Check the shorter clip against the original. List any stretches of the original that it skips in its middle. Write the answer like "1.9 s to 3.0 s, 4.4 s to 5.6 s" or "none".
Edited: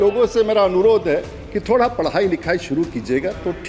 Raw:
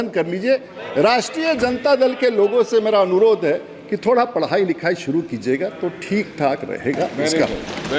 none